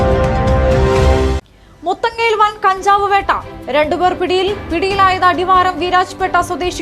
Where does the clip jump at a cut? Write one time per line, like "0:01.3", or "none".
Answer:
0:01.1